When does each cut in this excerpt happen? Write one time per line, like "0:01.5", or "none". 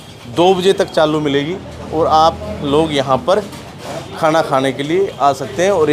none

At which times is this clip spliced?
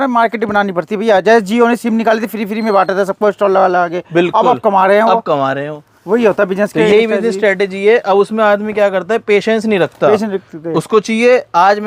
none

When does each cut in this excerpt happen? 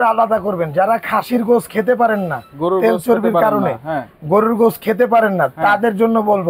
none

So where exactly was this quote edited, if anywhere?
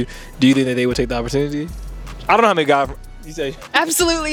none

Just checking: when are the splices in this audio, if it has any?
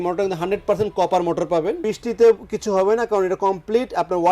0:01.8

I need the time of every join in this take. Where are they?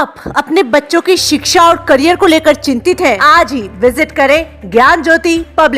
0:03.2

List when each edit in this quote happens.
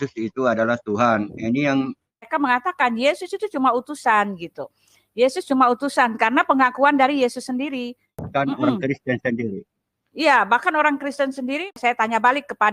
0:02.3
0:08.3
0:11.8

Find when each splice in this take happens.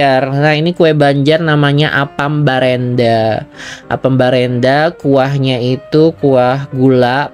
none

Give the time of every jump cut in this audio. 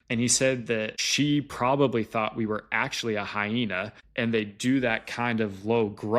0:01.0
0:04.0

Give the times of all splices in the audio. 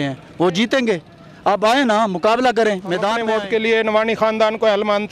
0:03.3

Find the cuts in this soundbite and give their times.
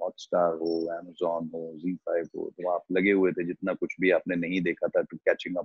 none

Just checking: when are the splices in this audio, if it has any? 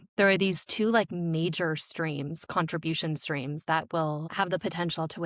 0:04.3

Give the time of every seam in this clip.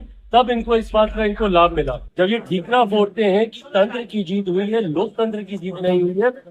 0:02.0

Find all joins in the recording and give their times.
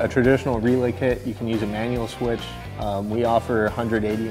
none

